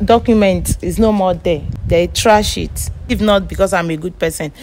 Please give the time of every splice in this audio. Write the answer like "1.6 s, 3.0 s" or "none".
1.7 s, 3.1 s